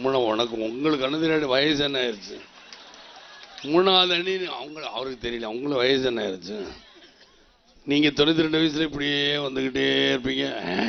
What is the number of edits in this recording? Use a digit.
0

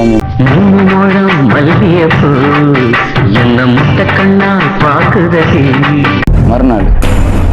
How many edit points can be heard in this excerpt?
0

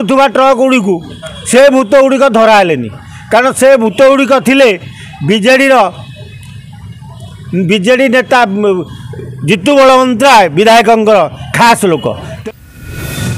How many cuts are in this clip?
1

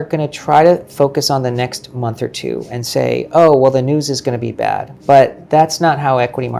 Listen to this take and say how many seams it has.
0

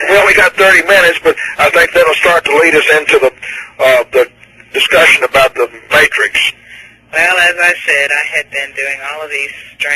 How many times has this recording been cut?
1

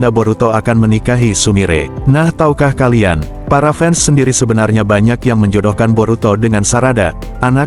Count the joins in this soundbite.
1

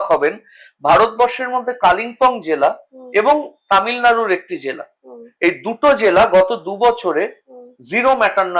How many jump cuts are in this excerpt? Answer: 0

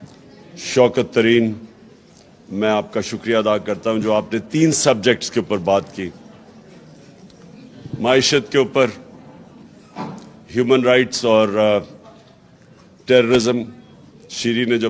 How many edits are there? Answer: 0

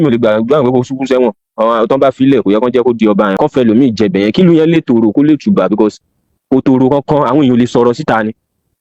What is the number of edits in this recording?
1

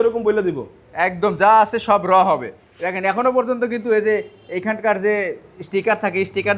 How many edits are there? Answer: 0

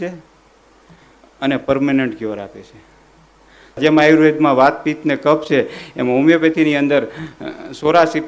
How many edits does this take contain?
1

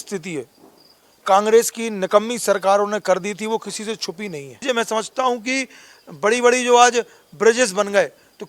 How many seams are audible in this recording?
1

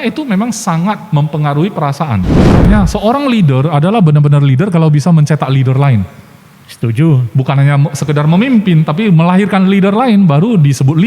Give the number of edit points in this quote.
1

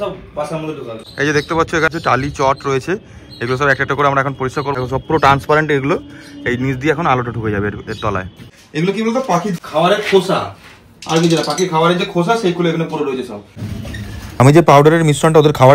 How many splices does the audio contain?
6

